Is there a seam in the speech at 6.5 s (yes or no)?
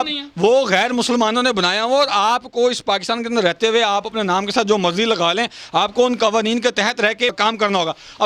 no